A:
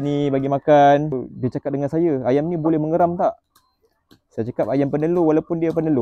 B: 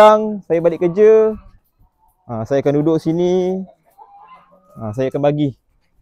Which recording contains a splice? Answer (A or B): A